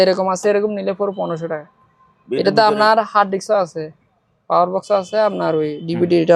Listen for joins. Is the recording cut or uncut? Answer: uncut